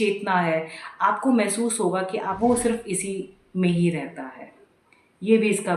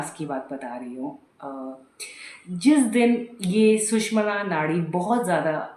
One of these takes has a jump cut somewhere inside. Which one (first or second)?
first